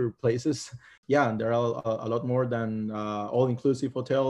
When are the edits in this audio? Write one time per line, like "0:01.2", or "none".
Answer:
0:00.9